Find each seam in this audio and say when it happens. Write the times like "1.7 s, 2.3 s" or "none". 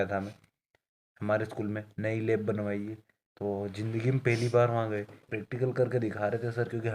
5.3 s